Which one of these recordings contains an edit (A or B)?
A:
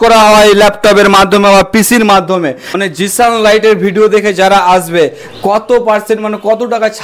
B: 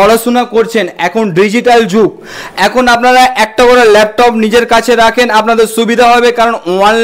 A